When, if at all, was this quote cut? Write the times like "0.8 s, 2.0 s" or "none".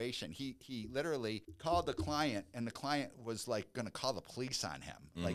1.5 s

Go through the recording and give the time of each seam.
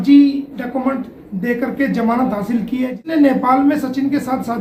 none

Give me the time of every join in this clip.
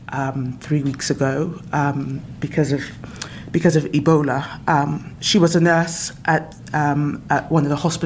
none

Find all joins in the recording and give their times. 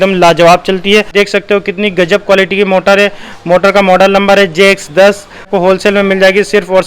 1.1 s, 5.5 s

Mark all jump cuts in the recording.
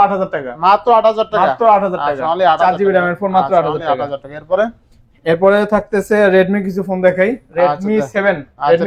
none

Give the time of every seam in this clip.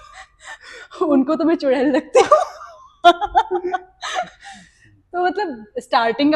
none

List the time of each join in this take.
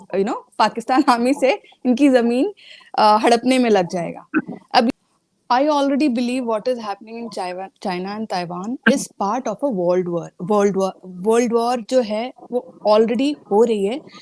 4.9 s

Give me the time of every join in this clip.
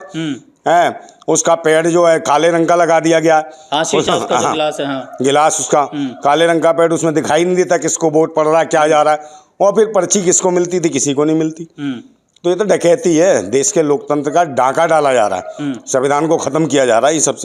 none

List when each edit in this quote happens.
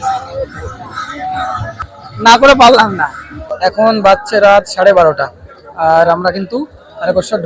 2.4 s, 3.7 s

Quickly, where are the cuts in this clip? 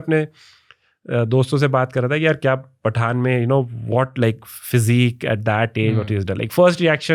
none

